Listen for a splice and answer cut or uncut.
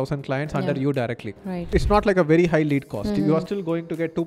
cut